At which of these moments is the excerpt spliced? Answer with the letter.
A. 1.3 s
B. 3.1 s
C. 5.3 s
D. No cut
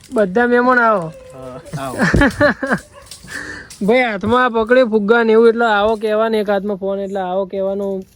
D